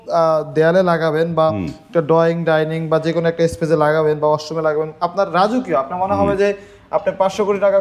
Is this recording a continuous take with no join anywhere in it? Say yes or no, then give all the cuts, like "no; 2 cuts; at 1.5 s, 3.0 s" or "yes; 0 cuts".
yes; 0 cuts